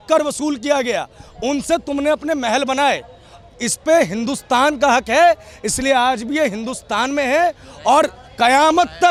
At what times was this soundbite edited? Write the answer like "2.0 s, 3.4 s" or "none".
none